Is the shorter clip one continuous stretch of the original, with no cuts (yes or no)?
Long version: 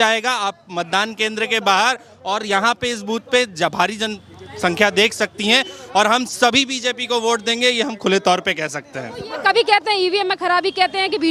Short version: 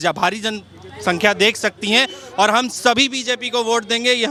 yes